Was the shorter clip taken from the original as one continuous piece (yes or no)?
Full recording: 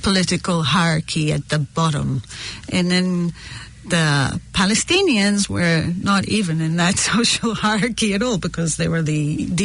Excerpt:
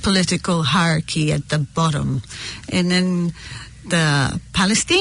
yes